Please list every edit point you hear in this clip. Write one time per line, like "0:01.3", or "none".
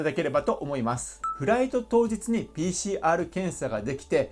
0:01.3